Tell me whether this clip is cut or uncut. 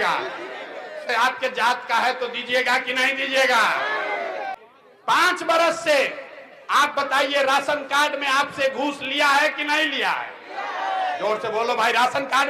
cut